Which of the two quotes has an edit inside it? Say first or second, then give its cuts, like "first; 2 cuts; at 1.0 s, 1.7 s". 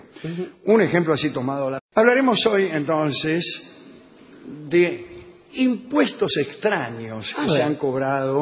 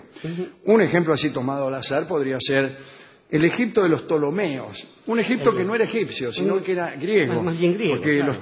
second; 1 cut; at 1.8 s